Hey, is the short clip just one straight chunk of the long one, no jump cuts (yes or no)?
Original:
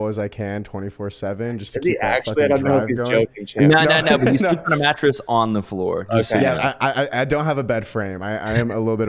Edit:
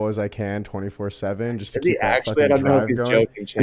yes